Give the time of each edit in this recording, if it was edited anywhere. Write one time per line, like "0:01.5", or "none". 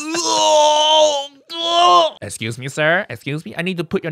0:02.2